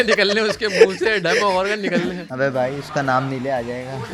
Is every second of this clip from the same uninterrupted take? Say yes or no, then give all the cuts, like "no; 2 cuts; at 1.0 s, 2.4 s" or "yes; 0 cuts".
no; 1 cut; at 2.2 s